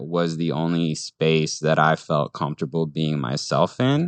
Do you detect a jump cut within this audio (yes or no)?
no